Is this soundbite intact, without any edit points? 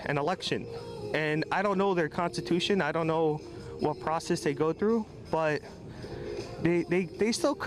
yes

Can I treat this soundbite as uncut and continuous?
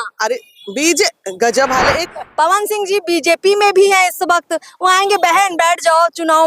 no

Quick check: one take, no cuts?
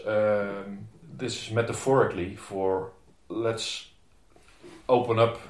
yes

